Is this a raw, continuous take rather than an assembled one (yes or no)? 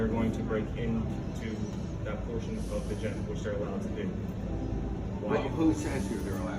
yes